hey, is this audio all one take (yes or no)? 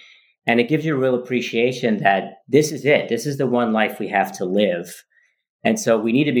yes